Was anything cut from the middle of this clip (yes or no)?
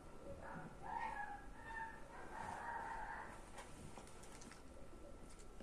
no